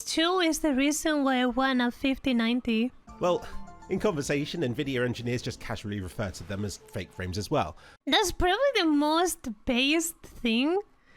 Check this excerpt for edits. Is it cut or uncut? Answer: cut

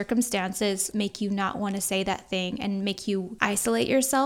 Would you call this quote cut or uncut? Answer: cut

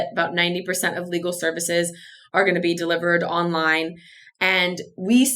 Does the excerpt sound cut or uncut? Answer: uncut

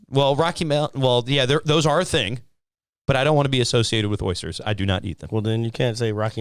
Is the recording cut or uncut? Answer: uncut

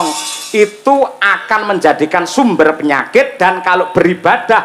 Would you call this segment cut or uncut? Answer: uncut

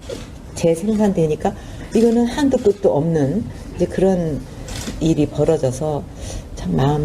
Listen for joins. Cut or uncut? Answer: cut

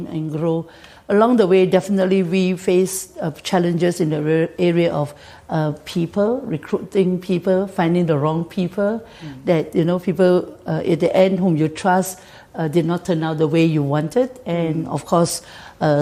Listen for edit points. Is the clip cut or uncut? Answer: uncut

